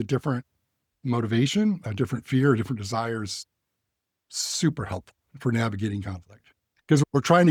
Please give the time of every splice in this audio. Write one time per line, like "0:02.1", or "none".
none